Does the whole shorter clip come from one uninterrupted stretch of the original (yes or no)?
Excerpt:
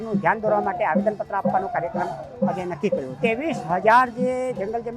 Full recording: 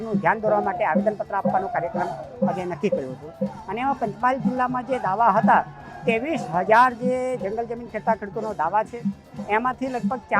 no